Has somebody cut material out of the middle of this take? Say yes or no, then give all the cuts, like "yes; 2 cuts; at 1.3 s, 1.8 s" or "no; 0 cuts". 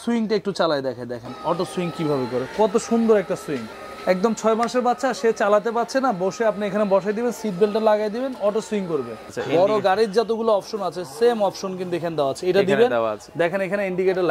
yes; 2 cuts; at 3.8 s, 9.3 s